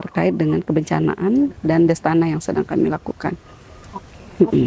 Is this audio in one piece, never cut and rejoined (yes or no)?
yes